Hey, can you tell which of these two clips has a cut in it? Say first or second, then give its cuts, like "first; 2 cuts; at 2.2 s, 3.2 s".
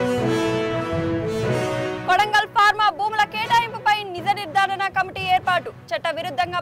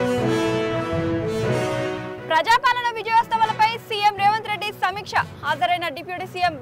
first; 1 cut; at 1.9 s